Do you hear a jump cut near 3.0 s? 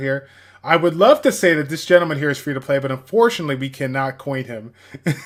no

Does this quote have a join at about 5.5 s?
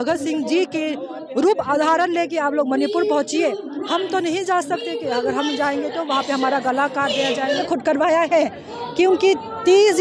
no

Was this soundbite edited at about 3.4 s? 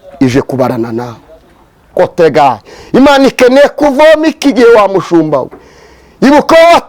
no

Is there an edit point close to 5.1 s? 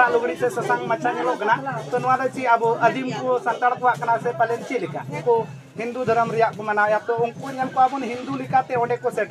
yes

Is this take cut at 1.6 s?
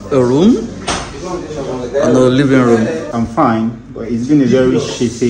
no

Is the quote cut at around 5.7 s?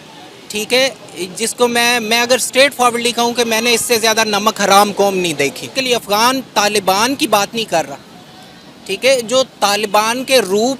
yes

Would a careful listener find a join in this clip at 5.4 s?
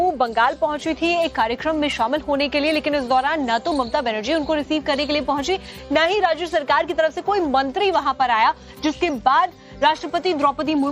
yes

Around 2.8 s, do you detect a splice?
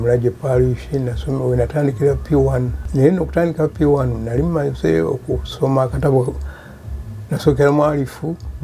yes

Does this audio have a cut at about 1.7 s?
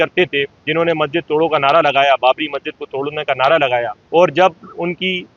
no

